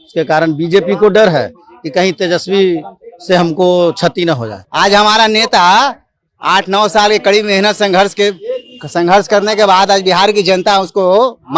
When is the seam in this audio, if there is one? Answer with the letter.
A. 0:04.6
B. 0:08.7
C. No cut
A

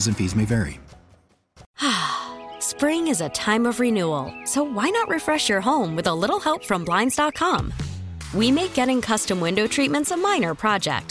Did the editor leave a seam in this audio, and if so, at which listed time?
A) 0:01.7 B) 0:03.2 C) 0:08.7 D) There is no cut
A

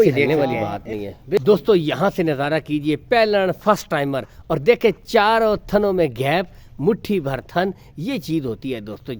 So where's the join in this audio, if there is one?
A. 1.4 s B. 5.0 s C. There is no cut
A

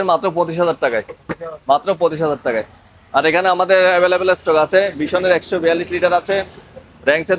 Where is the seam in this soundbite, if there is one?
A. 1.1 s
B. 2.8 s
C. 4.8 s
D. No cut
D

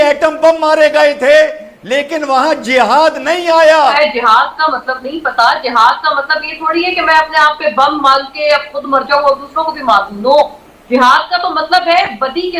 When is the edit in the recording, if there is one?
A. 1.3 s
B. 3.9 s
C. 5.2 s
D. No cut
B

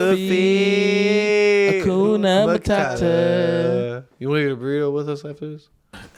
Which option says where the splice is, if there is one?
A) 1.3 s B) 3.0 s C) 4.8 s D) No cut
D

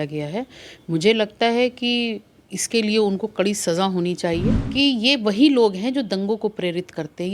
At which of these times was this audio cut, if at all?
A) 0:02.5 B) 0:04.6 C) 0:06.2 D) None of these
B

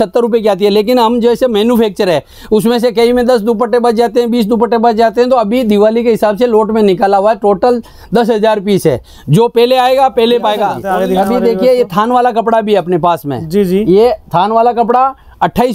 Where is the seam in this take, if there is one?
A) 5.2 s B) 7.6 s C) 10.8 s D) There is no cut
C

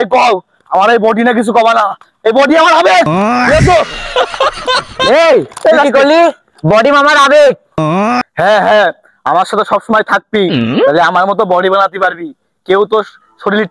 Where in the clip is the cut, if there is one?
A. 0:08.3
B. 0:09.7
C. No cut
A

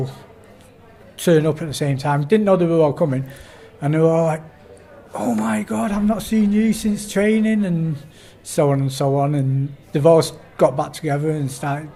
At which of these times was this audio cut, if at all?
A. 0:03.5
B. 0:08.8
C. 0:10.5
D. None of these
D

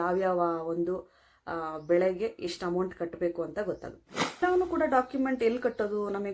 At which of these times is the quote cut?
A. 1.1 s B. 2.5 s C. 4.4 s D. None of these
C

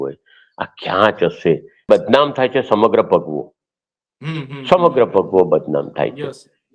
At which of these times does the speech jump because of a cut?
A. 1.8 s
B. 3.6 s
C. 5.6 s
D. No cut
A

